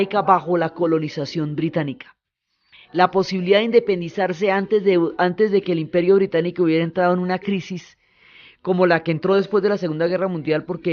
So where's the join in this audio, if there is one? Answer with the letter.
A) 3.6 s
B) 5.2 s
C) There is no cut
A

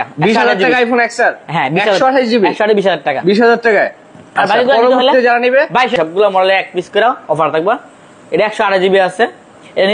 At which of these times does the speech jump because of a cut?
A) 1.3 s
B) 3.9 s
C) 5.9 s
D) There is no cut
C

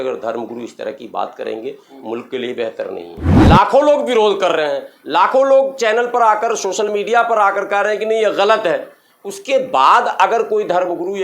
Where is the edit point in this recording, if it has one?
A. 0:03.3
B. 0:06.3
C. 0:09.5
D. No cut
A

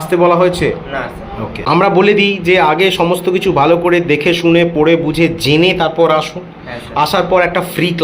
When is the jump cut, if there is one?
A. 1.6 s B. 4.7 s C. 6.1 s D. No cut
A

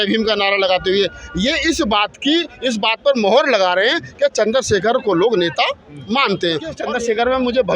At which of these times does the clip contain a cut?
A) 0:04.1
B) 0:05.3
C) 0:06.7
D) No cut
C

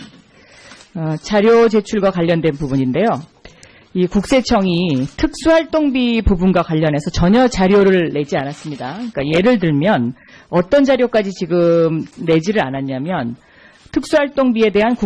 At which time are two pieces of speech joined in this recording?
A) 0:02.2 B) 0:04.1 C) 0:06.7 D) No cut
A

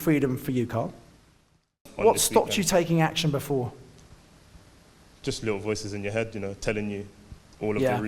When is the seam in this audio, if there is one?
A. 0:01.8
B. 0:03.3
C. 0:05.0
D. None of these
A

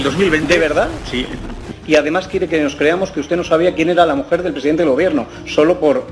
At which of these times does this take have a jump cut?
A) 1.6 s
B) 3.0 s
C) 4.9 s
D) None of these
A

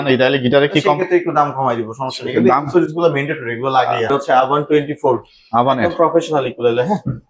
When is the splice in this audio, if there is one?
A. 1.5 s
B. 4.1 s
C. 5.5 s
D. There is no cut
B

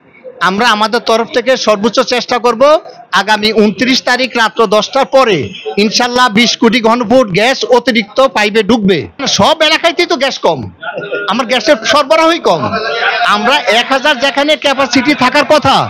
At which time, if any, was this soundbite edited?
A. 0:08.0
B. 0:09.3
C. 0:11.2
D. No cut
B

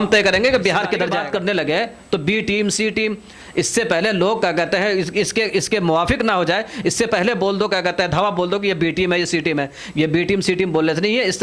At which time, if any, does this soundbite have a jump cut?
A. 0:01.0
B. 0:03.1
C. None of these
A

